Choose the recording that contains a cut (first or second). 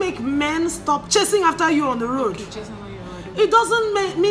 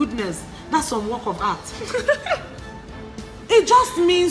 first